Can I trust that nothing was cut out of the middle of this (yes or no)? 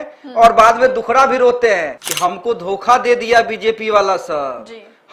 no